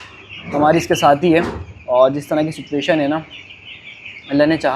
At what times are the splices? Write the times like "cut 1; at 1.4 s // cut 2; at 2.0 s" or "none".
none